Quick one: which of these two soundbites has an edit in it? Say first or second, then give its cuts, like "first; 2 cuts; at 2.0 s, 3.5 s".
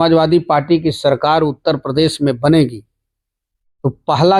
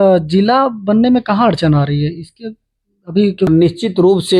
second; 1 cut; at 3.5 s